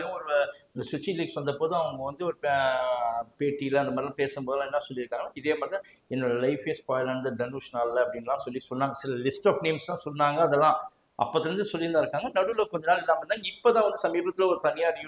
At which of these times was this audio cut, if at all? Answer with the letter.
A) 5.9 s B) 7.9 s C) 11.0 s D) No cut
D